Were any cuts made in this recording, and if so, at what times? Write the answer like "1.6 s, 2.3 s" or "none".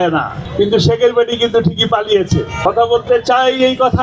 2.5 s

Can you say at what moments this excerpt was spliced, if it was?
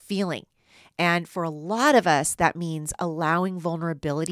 none

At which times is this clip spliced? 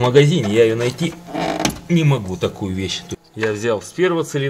3.1 s

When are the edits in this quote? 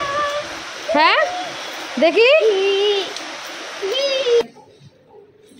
4.4 s

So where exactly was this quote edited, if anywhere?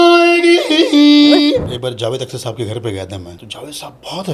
1.7 s, 3.3 s

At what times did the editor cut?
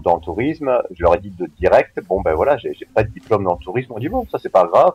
2.9 s

